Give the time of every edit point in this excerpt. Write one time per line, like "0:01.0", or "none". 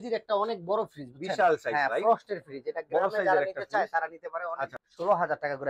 0:04.7